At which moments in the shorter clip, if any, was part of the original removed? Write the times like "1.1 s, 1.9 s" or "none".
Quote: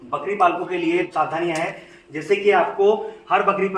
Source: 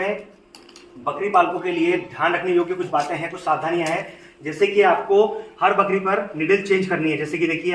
1.1 s